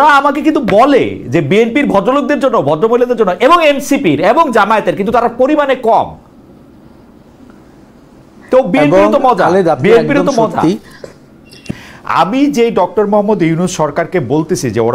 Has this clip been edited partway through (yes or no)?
yes